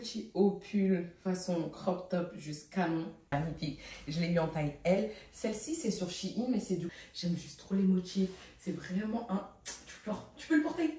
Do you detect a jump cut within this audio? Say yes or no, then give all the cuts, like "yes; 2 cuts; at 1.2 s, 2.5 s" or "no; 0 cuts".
yes; 2 cuts; at 3.3 s, 6.9 s